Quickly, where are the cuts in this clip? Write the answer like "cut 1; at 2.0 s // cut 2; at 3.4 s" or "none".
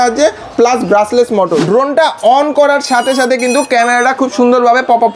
cut 1; at 1.6 s